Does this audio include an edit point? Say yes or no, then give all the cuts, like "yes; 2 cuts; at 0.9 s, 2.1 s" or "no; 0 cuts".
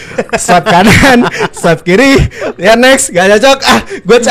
no; 0 cuts